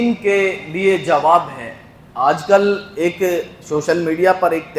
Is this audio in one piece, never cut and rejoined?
yes; 0 cuts

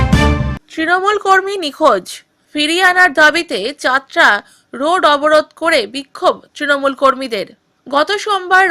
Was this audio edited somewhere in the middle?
no; 0 cuts

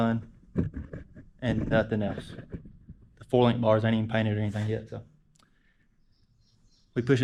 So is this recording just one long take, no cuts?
yes; 0 cuts

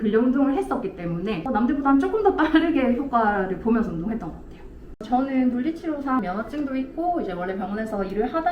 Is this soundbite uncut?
no; 2 cuts; at 1.4 s, 4.9 s

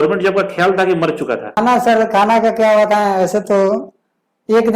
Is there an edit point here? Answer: yes; 1 cut; at 1.6 s

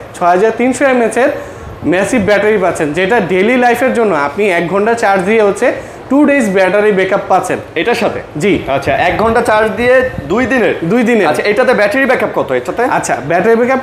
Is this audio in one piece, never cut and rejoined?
yes; 0 cuts

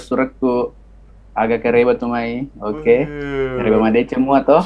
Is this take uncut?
yes; 0 cuts

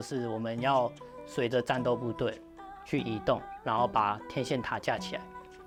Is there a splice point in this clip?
no; 0 cuts

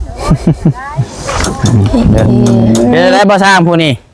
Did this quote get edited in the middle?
yes; 1 cut; at 1.2 s

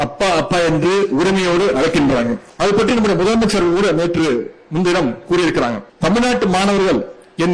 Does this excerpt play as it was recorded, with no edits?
no; 2 cuts; at 2.4 s, 5.9 s

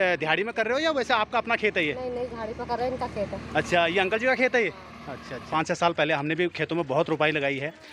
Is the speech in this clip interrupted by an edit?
yes; 1 cut; at 5.5 s

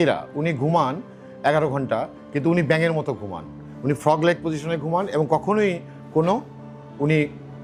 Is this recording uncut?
yes; 0 cuts

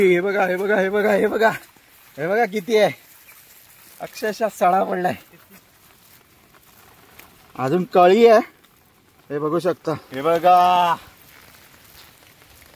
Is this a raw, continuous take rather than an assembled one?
no; 1 cut; at 10.1 s

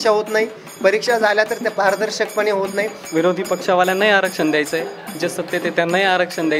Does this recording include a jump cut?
yes; 1 cut; at 3.0 s

